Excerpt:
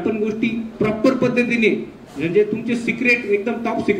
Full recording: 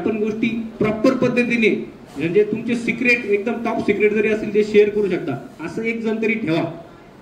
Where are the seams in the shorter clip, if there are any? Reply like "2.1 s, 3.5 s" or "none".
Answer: none